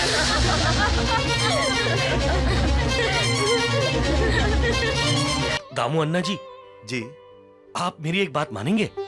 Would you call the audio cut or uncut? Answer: cut